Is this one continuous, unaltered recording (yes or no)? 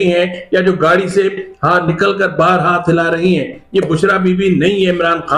yes